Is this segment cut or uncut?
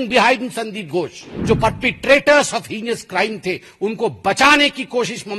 cut